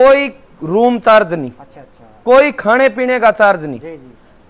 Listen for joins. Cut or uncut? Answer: uncut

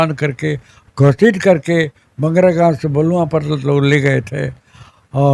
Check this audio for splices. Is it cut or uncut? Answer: uncut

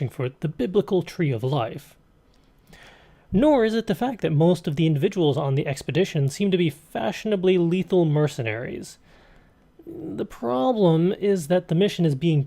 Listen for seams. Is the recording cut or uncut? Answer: cut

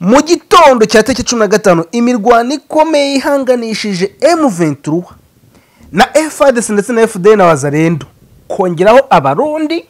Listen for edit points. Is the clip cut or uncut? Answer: uncut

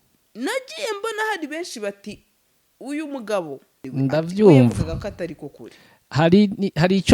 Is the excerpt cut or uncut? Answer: cut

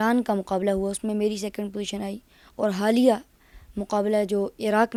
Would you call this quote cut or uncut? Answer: uncut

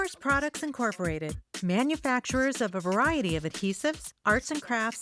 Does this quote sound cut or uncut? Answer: uncut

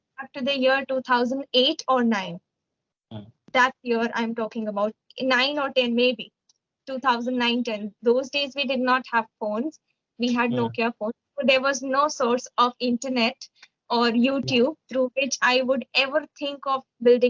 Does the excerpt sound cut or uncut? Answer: uncut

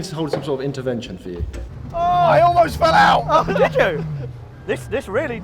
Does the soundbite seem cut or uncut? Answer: cut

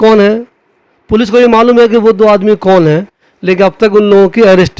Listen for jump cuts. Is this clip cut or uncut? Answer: uncut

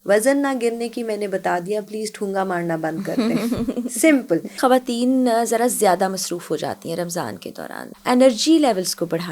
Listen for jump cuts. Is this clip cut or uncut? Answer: cut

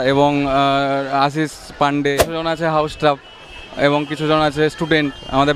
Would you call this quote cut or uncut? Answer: cut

